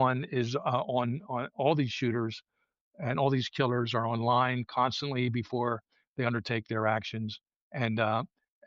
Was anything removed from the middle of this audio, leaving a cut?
no; 0 cuts

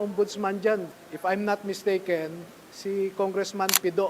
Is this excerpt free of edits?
no; 1 cut; at 0.9 s

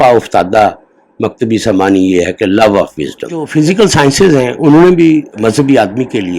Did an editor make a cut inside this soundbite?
yes; 1 cut; at 3.5 s

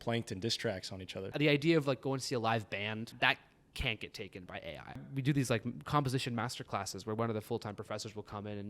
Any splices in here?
yes; 3 cuts; at 1.3 s, 3.1 s, 5.0 s

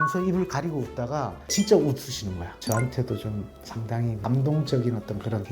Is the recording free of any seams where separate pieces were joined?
yes; 0 cuts

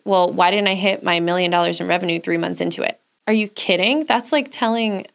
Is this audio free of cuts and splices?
no; 1 cut; at 3.1 s

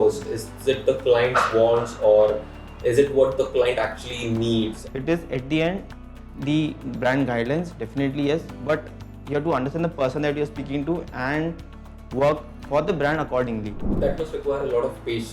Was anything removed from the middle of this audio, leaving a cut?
yes; 2 cuts; at 4.8 s, 13.8 s

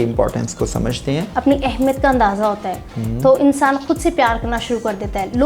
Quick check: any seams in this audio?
yes; 1 cut; at 1.3 s

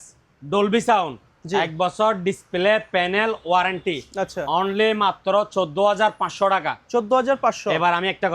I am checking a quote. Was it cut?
no; 0 cuts

